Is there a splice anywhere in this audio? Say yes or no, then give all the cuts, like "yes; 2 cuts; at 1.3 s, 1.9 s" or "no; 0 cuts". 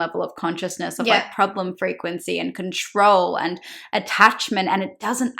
no; 0 cuts